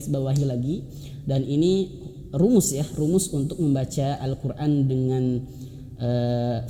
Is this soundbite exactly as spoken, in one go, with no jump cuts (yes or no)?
yes